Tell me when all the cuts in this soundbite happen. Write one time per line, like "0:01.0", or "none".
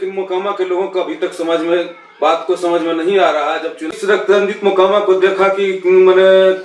0:03.9